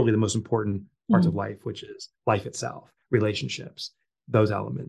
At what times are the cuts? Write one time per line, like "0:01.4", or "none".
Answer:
none